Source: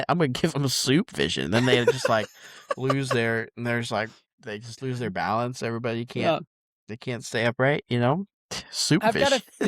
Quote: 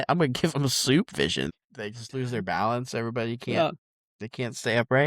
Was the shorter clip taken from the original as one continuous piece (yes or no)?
no